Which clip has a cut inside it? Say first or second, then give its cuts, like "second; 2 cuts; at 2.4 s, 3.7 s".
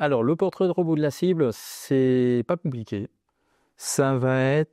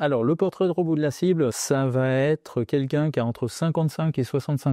second; 1 cut; at 1.6 s